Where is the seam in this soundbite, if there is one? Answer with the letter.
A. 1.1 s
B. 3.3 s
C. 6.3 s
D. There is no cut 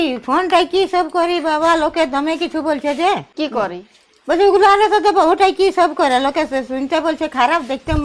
B